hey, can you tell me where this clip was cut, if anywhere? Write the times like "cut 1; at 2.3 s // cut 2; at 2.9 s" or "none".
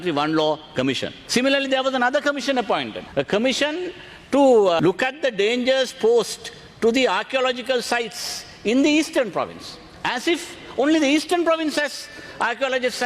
cut 1; at 1.1 s // cut 2; at 3.0 s // cut 3; at 4.8 s